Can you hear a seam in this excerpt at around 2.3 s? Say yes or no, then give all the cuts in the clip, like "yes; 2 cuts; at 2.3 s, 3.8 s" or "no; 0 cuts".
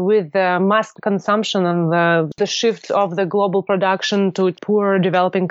yes; 3 cuts; at 0.9 s, 2.3 s, 4.6 s